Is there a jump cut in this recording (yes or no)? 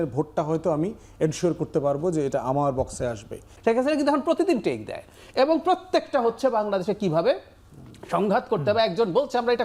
yes